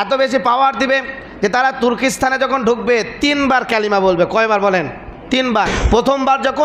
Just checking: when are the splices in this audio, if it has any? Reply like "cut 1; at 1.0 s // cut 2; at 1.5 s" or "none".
cut 1; at 5.7 s